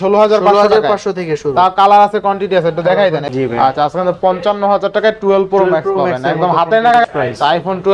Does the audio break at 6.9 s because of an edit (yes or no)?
yes